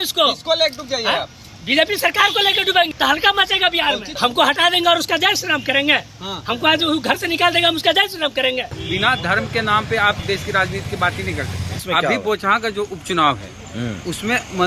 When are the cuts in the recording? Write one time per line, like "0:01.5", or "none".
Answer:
0:02.9
0:04.2
0:08.7
0:10.2
0:11.8